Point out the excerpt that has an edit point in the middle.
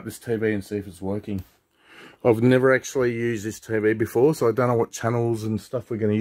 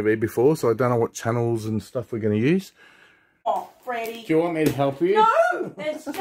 second; 1 cut; at 3.5 s

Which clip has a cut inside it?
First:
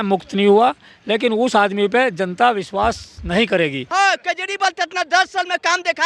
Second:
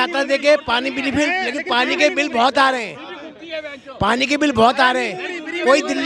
first; 1 cut; at 3.8 s

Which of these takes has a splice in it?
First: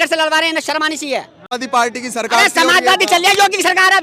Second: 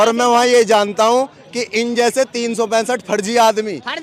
first; 1 cut; at 1.4 s

